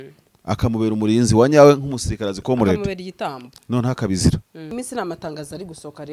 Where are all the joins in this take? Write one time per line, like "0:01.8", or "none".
0:04.7